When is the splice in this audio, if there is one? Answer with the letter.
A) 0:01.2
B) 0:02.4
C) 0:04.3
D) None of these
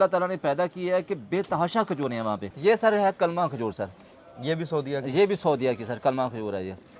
B